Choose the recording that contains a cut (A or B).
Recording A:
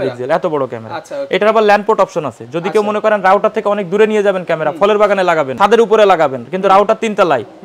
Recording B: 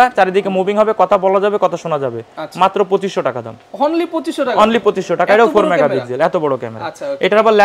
A